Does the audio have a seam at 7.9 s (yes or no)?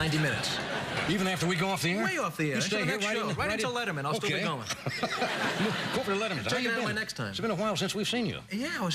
yes